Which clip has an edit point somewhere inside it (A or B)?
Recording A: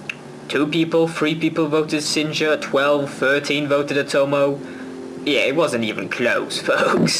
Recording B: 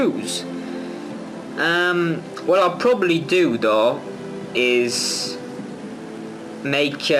B